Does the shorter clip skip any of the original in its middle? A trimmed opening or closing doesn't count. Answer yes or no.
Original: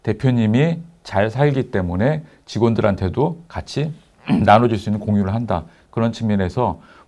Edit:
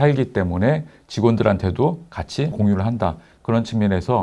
yes